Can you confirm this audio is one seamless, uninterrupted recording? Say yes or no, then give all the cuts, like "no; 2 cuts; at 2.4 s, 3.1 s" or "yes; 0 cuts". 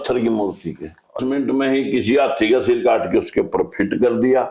no; 1 cut; at 1.2 s